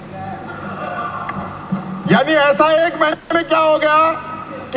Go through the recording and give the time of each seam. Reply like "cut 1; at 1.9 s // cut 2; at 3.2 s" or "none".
none